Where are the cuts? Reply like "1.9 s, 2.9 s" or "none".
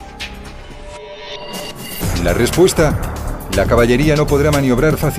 0.9 s